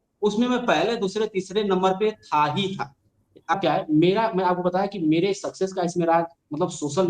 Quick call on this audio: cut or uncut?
cut